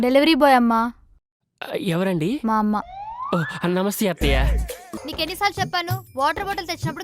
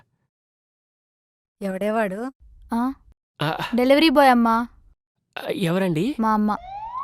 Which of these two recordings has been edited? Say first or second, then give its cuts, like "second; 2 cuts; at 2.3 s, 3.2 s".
first; 1 cut; at 5.0 s